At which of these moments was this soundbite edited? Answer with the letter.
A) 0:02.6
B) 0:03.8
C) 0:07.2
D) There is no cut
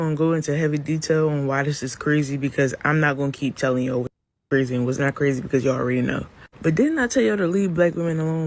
D